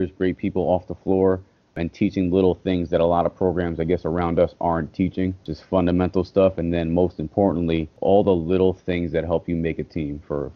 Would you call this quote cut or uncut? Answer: cut